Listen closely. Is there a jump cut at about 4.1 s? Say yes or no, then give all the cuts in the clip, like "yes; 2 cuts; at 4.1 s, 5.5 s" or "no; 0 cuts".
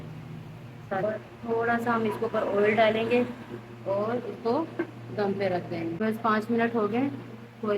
no; 2 cuts; at 1.0 s, 6.0 s